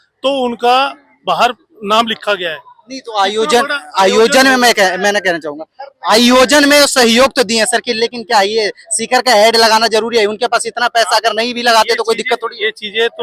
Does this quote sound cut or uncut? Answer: uncut